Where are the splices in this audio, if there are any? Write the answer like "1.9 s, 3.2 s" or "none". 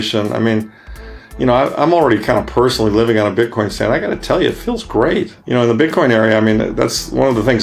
5.4 s

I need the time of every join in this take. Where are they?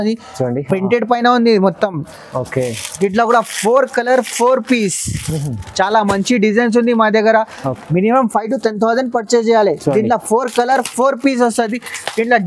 none

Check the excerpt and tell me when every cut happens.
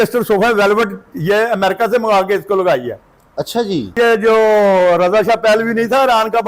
3.9 s

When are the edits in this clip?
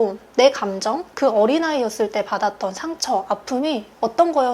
1.1 s

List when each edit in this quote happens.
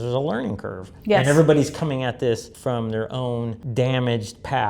2.5 s, 3.6 s

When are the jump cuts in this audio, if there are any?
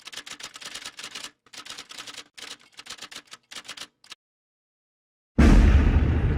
1.4 s

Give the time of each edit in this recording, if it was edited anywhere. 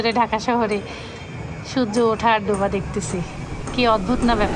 none

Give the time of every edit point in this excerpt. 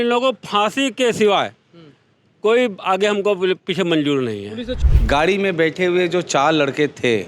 4.7 s

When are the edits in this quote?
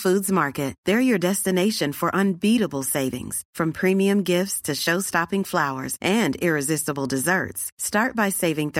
none

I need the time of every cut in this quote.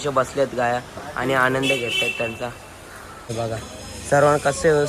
3.3 s

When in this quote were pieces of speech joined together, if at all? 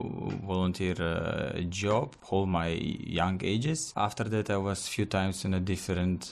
2.2 s, 3.9 s

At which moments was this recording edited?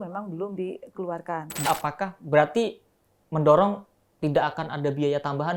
1.7 s

